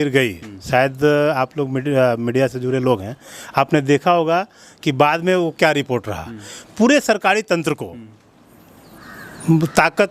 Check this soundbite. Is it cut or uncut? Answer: uncut